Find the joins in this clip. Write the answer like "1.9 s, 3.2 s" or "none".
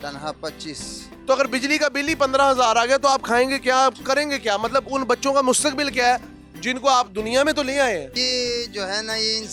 1.1 s, 8.2 s